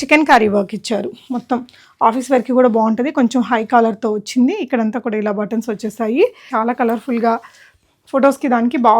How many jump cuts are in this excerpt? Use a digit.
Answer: 1